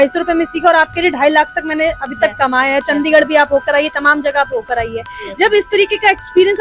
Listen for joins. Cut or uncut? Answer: uncut